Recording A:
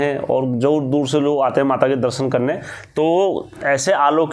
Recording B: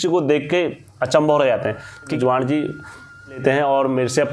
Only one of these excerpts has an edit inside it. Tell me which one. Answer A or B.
B